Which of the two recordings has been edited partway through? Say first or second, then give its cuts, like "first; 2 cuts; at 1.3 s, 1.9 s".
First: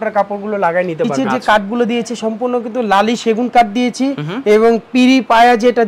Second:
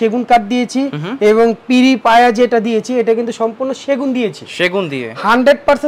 first; 1 cut; at 1.1 s